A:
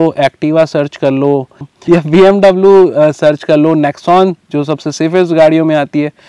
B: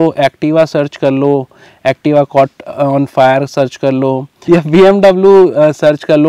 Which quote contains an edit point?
A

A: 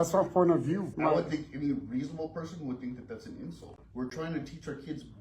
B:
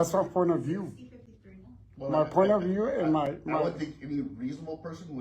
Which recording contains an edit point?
A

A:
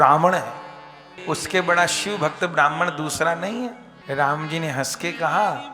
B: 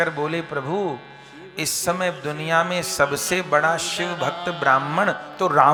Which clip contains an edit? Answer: A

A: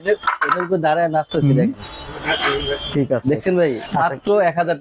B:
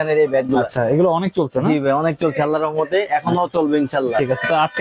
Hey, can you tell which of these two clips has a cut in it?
A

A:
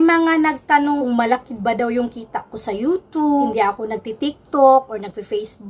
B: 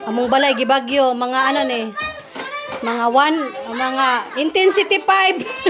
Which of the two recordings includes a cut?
A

